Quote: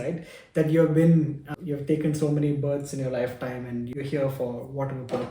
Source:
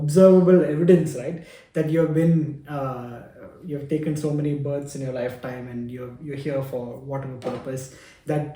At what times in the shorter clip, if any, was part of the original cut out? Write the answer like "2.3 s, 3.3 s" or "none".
1.4 s, 3.9 s